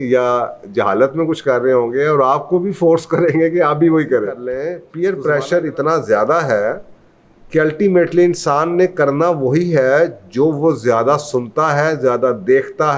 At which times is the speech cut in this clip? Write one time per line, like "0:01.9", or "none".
0:04.8